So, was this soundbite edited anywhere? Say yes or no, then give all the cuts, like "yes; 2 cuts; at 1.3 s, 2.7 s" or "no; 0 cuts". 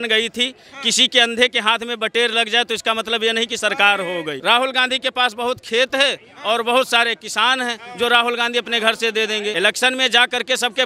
yes; 2 cuts; at 4.3 s, 9.5 s